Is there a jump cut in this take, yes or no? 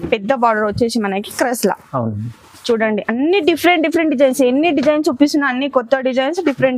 no